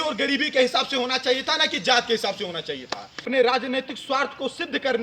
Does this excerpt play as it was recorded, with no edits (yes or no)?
no